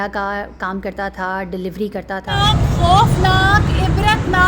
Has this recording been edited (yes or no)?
yes